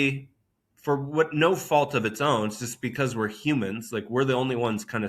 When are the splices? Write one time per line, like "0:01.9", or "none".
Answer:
none